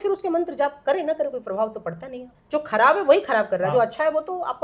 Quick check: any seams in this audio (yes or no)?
no